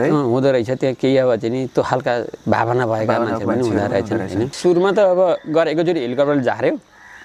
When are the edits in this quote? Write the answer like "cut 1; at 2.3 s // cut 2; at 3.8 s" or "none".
cut 1; at 4.5 s